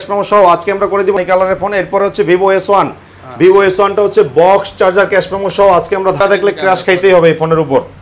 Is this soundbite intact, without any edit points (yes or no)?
no